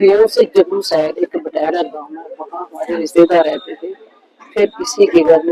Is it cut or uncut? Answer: uncut